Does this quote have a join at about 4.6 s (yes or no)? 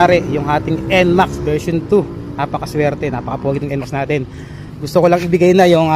no